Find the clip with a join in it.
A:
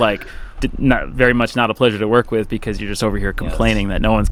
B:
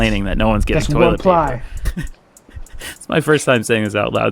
B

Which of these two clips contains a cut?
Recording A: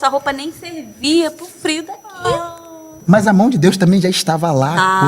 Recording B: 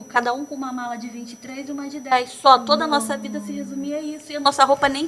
A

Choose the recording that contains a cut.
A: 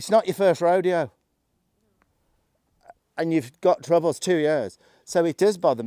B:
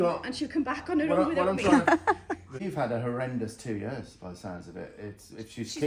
B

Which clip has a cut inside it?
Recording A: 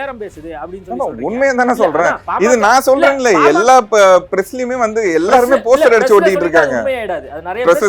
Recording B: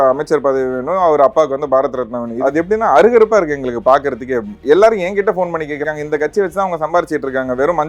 B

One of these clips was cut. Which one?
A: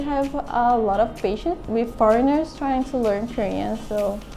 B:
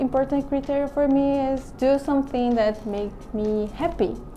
A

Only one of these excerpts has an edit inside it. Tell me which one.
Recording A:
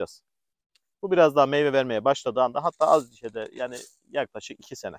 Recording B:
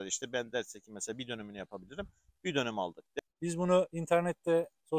B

